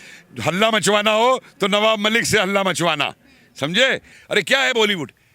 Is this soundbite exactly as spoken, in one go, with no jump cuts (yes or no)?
no